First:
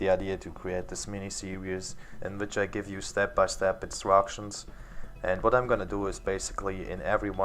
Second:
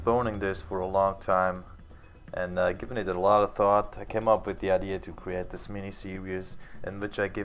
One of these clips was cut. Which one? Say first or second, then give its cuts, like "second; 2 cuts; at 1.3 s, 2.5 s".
second; 1 cut; at 1.1 s